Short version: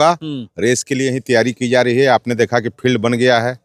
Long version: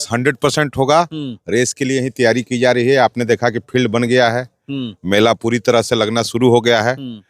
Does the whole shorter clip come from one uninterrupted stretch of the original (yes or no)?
yes